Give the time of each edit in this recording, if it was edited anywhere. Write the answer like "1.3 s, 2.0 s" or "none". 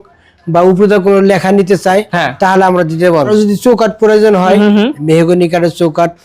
3.3 s